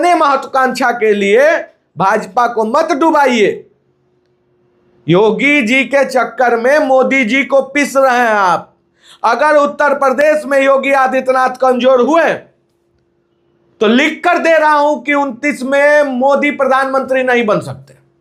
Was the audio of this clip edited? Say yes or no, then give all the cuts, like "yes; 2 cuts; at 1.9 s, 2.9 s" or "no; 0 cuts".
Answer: no; 0 cuts